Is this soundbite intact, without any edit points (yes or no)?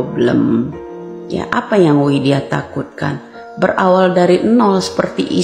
yes